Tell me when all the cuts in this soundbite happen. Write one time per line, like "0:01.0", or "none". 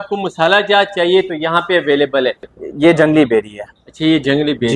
0:02.5